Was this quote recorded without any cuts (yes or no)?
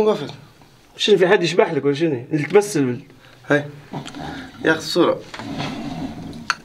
yes